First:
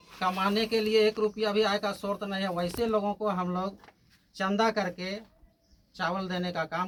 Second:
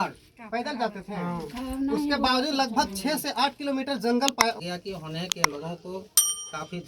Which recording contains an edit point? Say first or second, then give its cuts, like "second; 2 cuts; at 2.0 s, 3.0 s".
second; 1 cut; at 4.6 s